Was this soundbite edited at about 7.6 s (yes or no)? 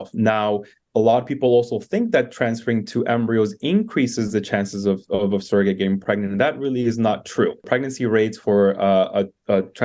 yes